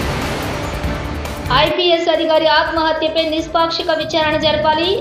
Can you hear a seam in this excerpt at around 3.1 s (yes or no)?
no